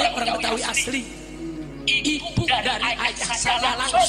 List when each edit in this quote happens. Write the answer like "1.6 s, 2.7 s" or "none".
none